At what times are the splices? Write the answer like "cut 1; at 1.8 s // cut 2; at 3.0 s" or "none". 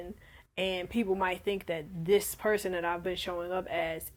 none